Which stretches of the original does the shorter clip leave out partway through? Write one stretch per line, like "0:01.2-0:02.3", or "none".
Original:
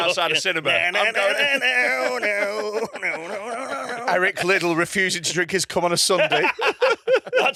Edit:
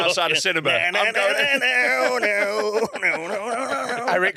none